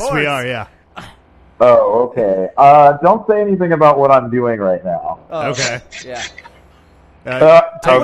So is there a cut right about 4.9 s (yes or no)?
no